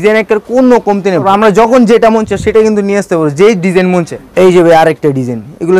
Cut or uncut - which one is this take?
cut